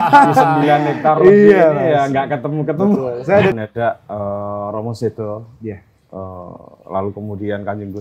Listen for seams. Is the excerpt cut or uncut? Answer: cut